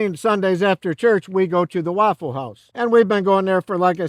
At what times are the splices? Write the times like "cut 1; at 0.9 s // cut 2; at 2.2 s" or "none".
none